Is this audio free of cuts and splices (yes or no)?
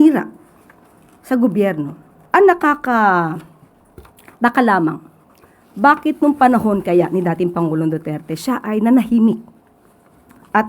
no